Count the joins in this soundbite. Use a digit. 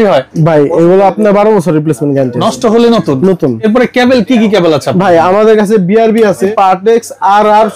2